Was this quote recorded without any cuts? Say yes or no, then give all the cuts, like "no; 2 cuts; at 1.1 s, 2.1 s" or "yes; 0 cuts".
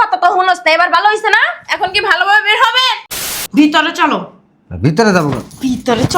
no; 1 cut; at 3.3 s